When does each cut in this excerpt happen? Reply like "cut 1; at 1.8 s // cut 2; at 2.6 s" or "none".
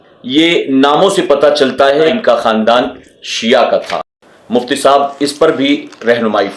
cut 1; at 2.1 s